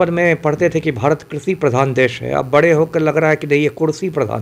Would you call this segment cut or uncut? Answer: uncut